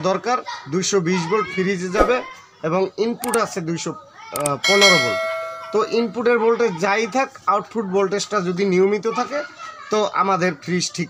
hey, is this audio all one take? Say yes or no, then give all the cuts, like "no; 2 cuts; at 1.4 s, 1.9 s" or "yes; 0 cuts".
yes; 0 cuts